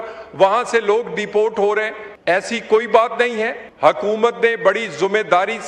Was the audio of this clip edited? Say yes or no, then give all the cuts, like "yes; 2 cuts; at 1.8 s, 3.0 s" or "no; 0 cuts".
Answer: yes; 2 cuts; at 2.0 s, 3.6 s